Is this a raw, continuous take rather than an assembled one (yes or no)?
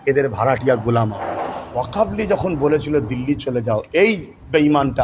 no